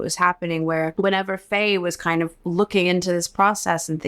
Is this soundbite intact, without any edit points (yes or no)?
no